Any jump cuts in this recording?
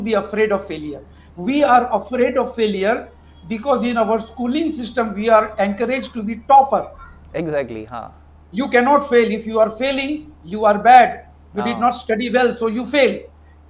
no; 0 cuts

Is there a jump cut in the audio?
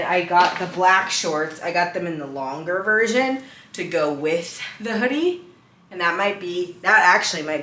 no; 0 cuts

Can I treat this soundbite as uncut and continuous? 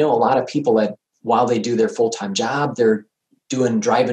no; 1 cut; at 1.1 s

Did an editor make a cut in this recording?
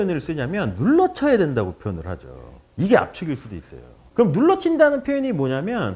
yes; 1 cut; at 4.0 s

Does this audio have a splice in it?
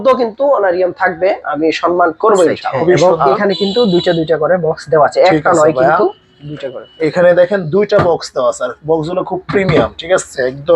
yes; 1 cut; at 2.7 s

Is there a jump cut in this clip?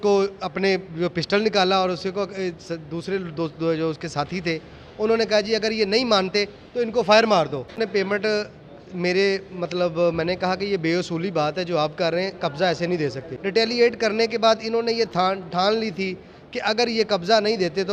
yes; 2 cuts; at 7.8 s, 13.3 s

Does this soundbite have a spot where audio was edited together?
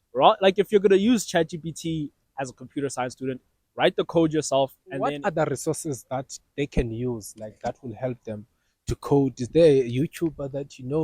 yes; 1 cut; at 5.2 s

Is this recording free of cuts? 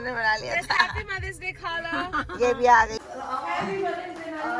no; 1 cut; at 3.0 s

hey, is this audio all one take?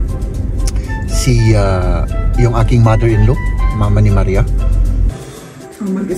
no; 1 cut; at 5.1 s

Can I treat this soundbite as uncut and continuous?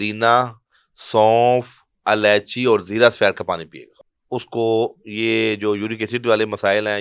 no; 1 cut; at 3.9 s

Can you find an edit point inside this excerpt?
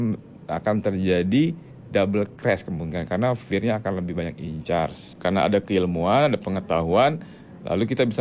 yes; 1 cut; at 5.1 s

